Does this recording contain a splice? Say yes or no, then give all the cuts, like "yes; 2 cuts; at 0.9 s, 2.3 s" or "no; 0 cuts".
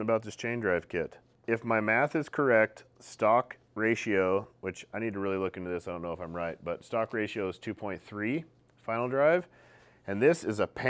no; 0 cuts